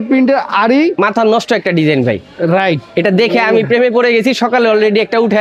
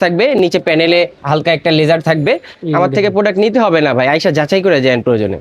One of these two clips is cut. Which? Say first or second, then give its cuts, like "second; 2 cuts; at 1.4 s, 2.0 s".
second; 2 cuts; at 1.2 s, 2.5 s